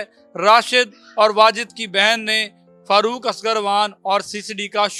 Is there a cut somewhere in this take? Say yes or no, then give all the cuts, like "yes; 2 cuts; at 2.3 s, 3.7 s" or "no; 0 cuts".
no; 0 cuts